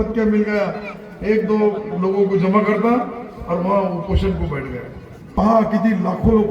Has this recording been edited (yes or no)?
yes